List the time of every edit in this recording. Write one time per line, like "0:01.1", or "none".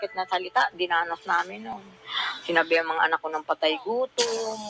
none